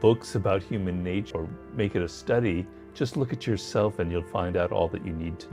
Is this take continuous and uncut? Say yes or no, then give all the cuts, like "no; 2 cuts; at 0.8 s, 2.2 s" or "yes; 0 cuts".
yes; 0 cuts